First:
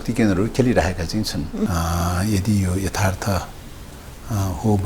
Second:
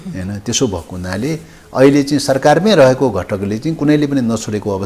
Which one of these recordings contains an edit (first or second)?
first